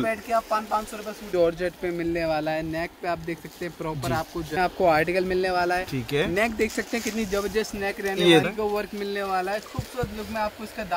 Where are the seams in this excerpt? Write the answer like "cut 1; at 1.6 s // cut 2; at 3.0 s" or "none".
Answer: cut 1; at 1.2 s // cut 2; at 4.5 s // cut 3; at 8.4 s